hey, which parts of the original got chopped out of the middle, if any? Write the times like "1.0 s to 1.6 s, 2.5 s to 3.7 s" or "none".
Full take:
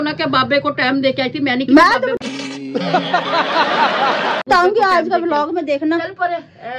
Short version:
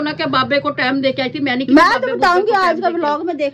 2.2 s to 4.4 s